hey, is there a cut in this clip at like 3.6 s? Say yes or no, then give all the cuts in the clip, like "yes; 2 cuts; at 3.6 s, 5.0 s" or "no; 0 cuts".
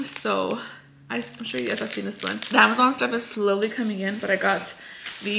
no; 1 cut; at 2.3 s